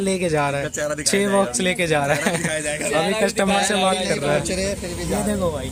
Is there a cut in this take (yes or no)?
no